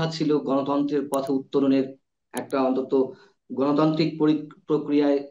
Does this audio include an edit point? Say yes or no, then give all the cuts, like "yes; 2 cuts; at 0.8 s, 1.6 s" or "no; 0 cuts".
no; 0 cuts